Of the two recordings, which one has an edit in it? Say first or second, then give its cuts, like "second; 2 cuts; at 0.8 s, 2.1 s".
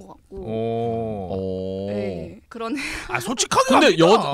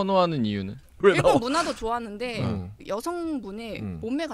second; 1 cut; at 1.0 s